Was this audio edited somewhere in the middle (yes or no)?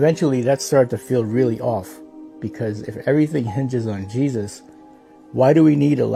no